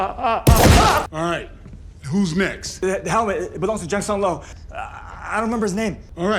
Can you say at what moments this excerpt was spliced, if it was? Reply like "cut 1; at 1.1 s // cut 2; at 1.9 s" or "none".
cut 1; at 4.5 s